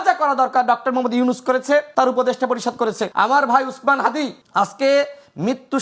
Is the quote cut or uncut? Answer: cut